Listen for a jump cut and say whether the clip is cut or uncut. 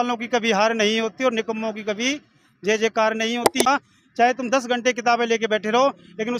cut